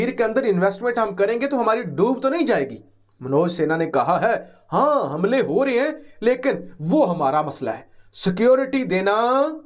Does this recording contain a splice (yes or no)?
no